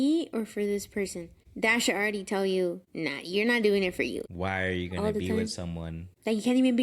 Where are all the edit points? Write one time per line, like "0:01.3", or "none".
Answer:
0:04.2